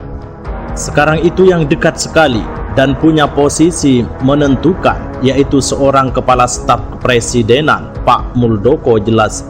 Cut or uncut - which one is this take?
cut